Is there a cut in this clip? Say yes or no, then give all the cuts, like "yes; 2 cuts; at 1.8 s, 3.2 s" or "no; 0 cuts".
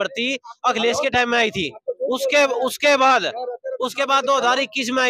no; 0 cuts